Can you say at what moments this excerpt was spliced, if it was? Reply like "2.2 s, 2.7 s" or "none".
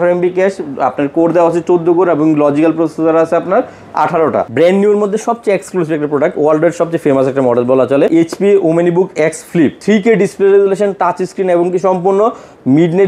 4.5 s, 8.1 s, 9.8 s